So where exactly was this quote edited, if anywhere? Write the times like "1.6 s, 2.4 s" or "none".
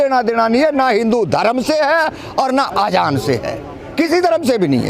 none